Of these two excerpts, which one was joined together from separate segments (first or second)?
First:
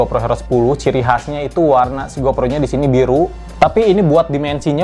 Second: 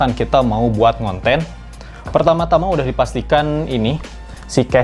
first